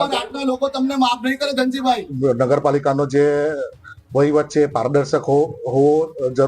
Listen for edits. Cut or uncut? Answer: cut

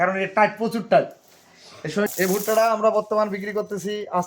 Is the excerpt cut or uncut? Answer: cut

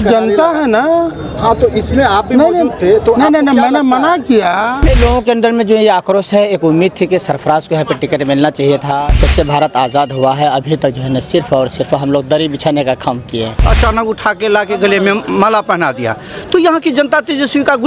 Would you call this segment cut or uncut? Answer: cut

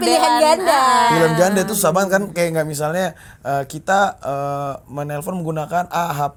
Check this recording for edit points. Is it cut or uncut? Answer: uncut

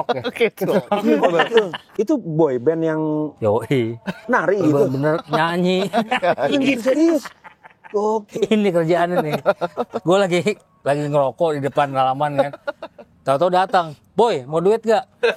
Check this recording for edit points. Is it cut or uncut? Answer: uncut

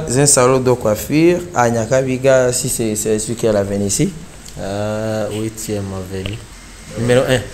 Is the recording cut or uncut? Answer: cut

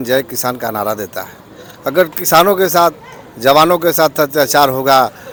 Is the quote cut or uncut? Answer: uncut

